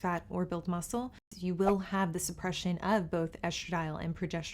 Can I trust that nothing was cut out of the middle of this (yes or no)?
no